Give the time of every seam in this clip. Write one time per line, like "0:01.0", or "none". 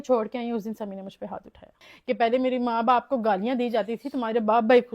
0:01.7